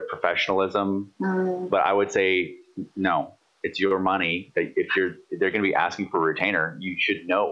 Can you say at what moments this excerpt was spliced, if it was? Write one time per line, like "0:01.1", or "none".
none